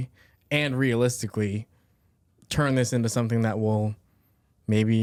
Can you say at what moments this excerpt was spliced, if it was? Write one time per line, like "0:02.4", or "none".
none